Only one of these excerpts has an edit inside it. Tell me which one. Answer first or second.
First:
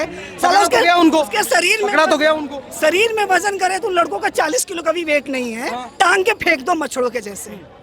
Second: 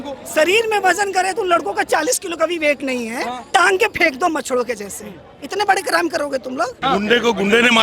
second